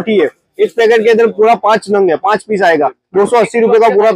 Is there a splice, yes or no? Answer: no